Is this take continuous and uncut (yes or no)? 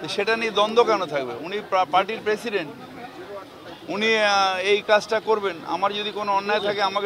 yes